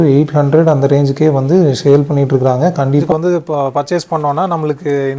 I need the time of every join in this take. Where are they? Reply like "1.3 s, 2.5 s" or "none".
3.1 s